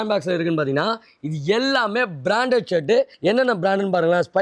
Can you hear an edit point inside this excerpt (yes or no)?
yes